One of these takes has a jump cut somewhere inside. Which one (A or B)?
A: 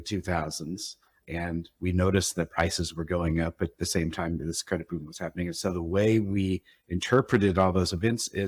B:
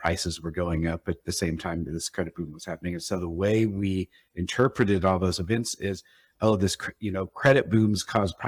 A